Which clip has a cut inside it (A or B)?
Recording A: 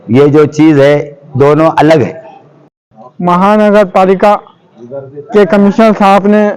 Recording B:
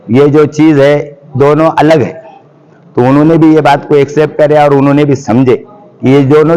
A